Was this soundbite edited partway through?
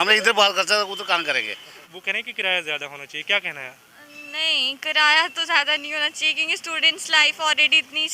yes; 1 cut; at 1.8 s

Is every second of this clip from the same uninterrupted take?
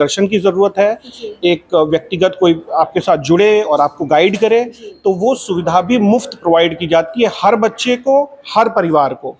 yes; 0 cuts

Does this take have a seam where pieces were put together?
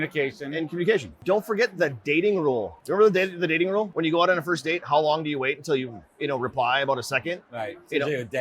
yes; 3 cuts; at 1.1 s, 2.8 s, 3.9 s

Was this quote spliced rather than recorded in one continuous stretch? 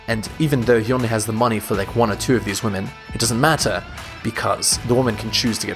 no; 0 cuts

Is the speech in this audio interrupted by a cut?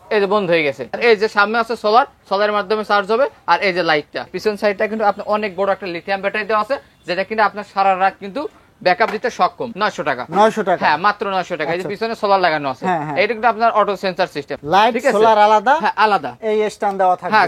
yes; 4 cuts; at 1.0 s, 4.3 s, 9.7 s, 14.5 s

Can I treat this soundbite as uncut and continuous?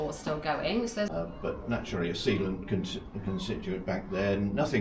no; 1 cut; at 1.1 s

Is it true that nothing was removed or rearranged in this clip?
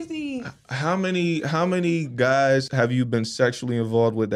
no; 1 cut; at 2.7 s

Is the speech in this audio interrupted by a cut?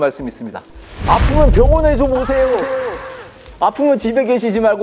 no; 0 cuts

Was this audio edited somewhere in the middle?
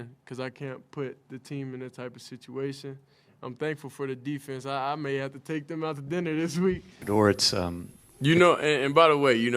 yes; 1 cut; at 6.9 s

